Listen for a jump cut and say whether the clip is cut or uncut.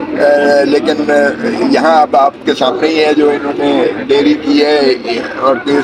uncut